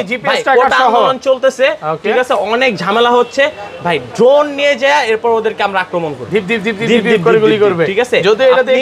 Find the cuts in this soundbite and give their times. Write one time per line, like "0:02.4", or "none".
none